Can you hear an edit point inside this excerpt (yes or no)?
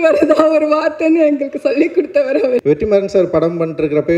yes